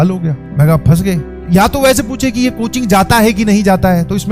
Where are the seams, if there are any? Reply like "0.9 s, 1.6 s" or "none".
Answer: none